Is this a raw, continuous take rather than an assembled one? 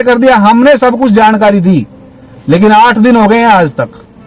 yes; 0 cuts

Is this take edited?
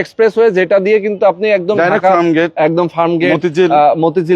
no; 0 cuts

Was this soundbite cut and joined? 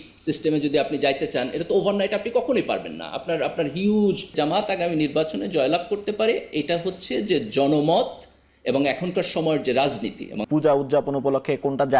yes; 2 cuts; at 4.3 s, 10.4 s

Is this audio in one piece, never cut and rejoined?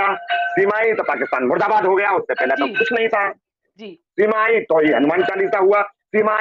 yes; 0 cuts

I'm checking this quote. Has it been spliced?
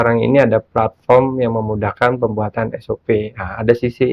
no; 0 cuts

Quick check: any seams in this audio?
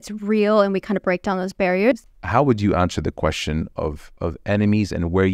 yes; 1 cut; at 1.9 s

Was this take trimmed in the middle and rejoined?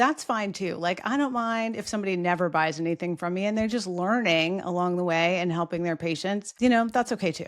yes; 1 cut; at 6.5 s

